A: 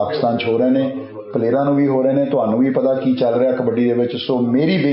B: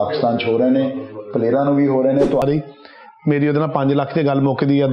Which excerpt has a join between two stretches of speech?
B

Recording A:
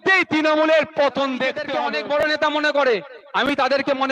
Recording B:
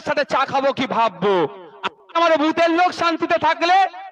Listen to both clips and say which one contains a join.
A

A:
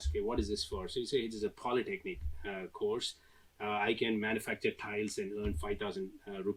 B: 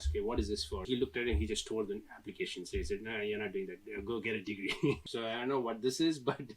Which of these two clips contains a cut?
B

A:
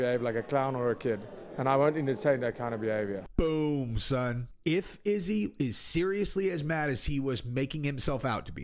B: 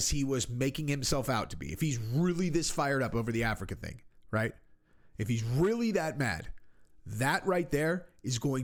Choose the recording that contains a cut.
A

